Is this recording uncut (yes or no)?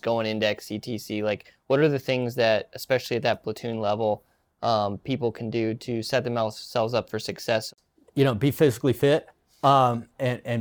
no